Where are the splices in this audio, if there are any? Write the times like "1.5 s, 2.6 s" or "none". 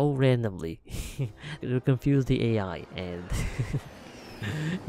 1.6 s